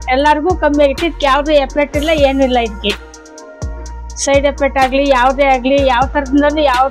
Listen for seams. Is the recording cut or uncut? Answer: uncut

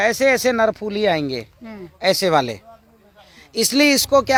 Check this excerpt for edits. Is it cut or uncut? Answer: uncut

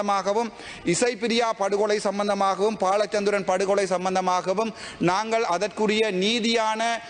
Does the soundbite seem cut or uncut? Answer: uncut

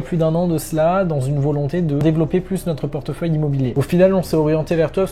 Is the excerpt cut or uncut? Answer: cut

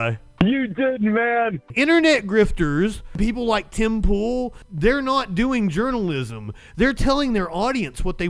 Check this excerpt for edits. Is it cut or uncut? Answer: cut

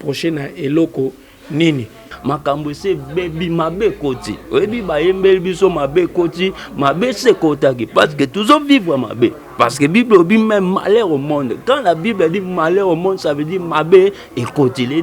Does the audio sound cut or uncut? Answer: cut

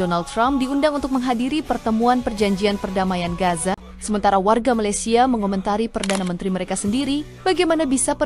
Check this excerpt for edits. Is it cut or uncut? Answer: cut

